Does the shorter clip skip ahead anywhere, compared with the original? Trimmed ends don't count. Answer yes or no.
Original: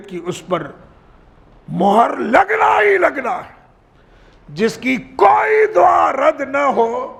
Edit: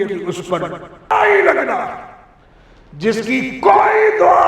yes